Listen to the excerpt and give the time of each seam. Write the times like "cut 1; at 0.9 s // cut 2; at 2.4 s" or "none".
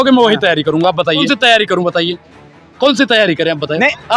cut 1; at 1.3 s